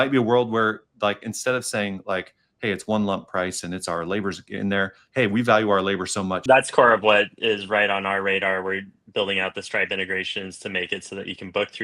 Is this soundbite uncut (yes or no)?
no